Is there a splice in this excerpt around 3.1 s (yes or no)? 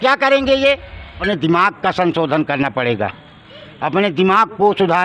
no